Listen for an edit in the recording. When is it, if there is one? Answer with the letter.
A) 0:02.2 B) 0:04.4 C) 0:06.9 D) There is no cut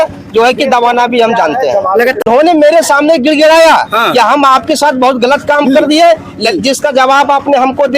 A